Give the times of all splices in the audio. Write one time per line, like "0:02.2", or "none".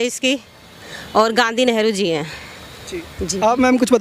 none